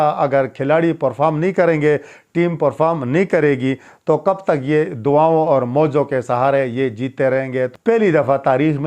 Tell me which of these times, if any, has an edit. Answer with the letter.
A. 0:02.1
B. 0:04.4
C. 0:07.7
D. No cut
C